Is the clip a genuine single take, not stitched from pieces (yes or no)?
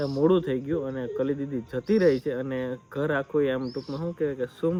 yes